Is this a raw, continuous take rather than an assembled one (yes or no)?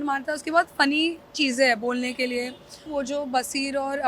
no